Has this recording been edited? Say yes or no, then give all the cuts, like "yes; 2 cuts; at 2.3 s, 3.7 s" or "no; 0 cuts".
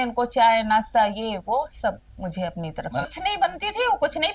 yes; 1 cut; at 3.0 s